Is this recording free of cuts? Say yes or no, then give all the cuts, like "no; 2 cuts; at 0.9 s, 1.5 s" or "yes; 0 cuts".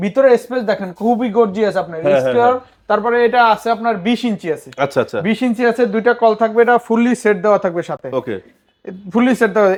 yes; 0 cuts